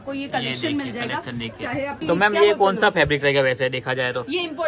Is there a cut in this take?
yes; 1 cut; at 2.0 s

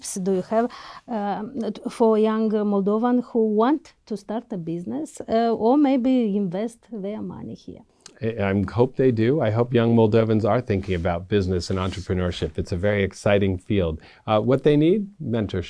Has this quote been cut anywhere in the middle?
no; 0 cuts

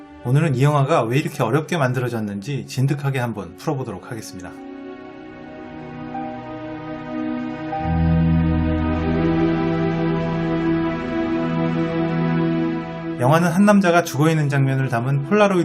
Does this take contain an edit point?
yes; 1 cut; at 2.9 s

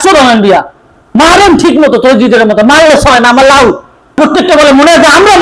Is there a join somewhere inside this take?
yes; 1 cut; at 4.2 s

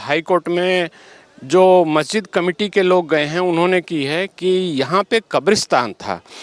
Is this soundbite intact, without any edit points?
yes; 0 cuts

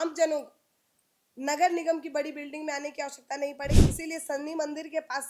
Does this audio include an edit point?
yes; 1 cut; at 3.8 s

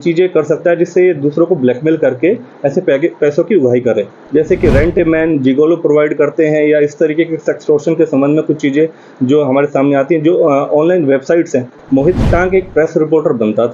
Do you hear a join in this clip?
yes; 2 cuts; at 4.2 s, 11.8 s

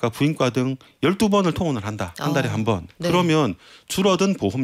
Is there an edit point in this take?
no; 0 cuts

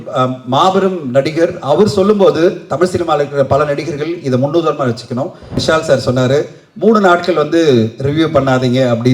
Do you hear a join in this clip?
yes; 1 cut; at 5.6 s

